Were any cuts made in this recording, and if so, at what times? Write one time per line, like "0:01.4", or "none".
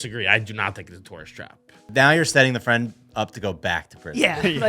0:01.8